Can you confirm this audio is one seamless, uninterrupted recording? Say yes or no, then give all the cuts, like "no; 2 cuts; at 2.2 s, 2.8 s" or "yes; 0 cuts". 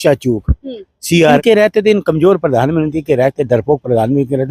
no; 1 cut; at 1.4 s